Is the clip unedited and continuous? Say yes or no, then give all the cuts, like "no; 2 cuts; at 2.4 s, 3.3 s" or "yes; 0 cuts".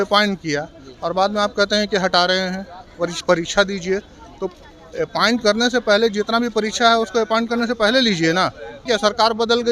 no; 1 cut; at 8.8 s